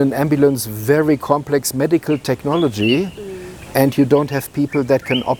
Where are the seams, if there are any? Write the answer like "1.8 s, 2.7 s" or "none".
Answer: none

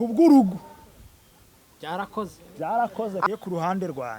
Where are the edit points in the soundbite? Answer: 3.3 s

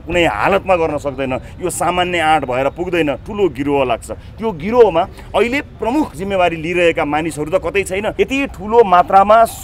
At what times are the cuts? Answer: 8.1 s

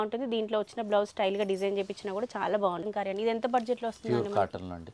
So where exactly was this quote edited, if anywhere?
2.9 s

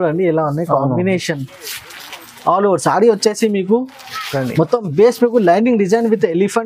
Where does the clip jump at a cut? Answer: none

